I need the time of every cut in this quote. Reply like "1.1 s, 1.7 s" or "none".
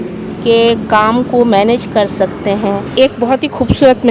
2.9 s

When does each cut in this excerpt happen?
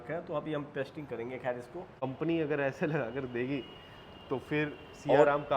2.0 s

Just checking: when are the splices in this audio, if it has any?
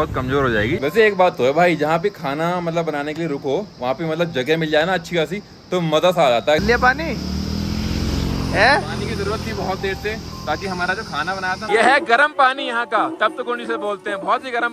0.8 s, 6.6 s, 11.7 s

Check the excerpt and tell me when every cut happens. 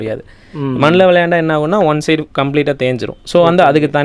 none

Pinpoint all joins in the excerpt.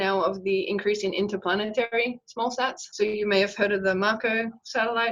2.8 s

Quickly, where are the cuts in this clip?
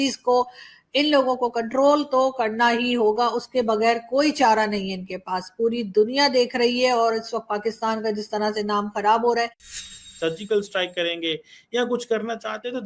9.7 s

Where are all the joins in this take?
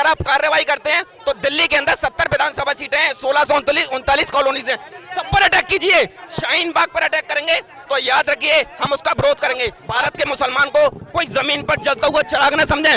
9.8 s

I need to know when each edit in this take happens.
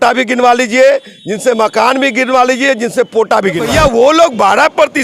3.6 s

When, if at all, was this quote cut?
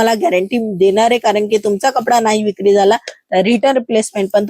none

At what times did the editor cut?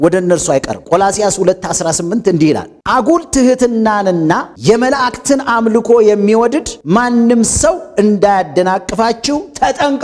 none

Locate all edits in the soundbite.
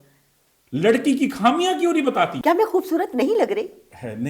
2.3 s

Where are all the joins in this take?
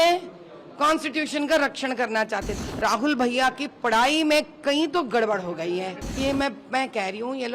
2.5 s, 6.0 s

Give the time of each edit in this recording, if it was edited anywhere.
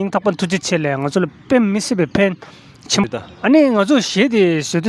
3.0 s

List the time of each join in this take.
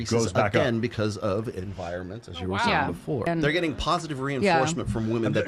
3.3 s

